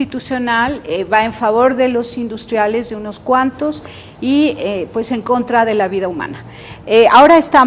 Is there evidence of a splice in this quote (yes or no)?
no